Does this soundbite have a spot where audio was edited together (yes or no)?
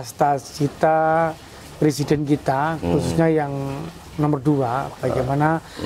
no